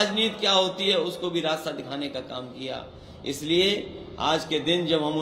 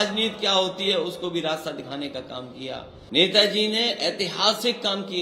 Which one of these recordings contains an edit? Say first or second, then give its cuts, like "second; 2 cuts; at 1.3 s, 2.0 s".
second; 1 cut; at 2.9 s